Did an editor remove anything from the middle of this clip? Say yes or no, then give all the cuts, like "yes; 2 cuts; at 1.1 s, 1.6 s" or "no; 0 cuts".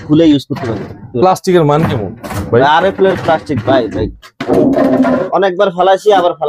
no; 0 cuts